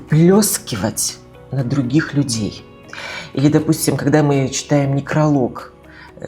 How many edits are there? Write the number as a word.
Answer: zero